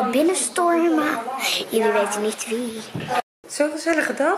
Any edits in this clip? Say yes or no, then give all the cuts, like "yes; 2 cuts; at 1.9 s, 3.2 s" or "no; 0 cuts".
yes; 1 cut; at 3.2 s